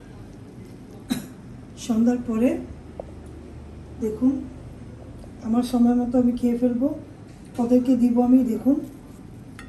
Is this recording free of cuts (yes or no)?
yes